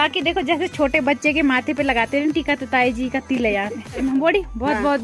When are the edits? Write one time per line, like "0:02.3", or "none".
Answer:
0:04.0